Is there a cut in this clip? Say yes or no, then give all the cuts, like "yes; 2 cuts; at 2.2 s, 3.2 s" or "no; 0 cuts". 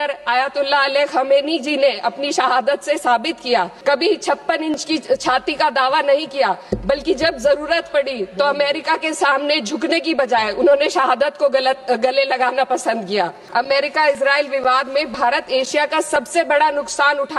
yes; 2 cuts; at 3.7 s, 13.4 s